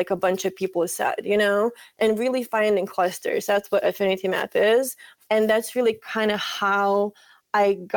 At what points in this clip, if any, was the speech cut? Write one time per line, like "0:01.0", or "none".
0:02.0
0:05.1